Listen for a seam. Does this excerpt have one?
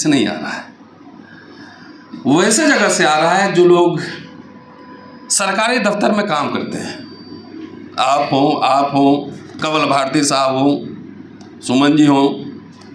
no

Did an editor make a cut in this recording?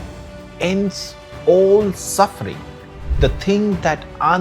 no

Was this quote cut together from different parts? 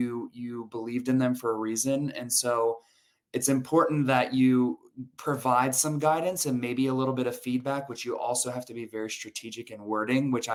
no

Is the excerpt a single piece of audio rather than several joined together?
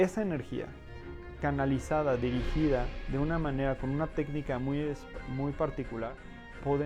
yes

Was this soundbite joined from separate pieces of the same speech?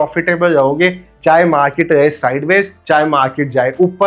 no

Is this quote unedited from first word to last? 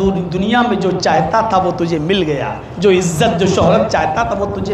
yes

